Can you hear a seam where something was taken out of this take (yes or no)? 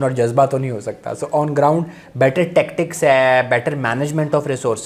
no